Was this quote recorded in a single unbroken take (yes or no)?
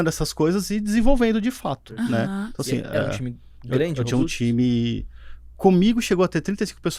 yes